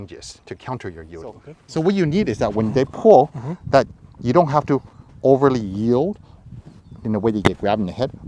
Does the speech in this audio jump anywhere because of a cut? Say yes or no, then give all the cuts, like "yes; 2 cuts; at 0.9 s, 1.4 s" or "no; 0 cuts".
yes; 1 cut; at 1.5 s